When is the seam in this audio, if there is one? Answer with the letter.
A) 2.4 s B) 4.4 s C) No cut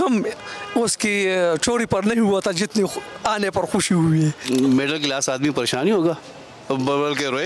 B